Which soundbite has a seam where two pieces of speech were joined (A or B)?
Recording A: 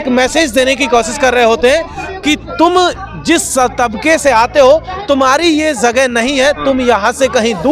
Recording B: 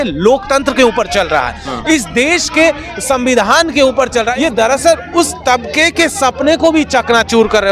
B